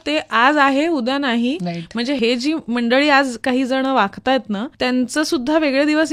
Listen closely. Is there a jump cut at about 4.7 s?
yes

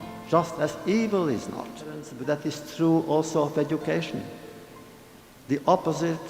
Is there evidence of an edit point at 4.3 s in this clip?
no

